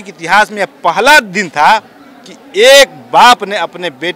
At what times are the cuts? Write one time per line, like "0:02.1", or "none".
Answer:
none